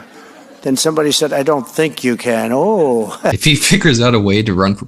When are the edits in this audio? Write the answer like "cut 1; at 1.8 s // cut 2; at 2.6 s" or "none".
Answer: cut 1; at 3.4 s